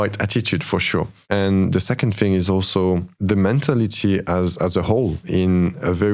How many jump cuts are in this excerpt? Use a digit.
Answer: 3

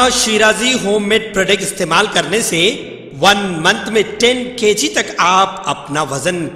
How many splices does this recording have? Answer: 0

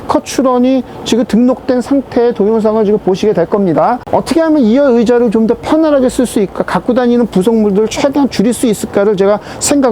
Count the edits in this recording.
0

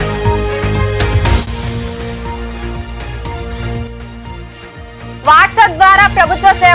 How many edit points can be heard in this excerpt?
1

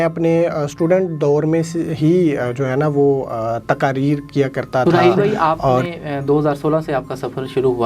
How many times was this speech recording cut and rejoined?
1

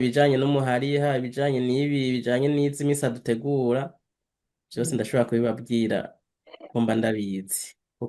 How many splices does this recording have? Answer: 0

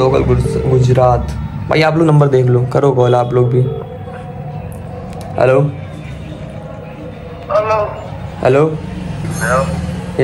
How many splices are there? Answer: 1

